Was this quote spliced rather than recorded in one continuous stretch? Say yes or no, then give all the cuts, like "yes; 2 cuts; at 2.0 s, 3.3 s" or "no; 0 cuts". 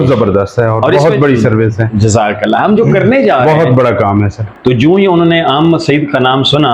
yes; 1 cut; at 4.4 s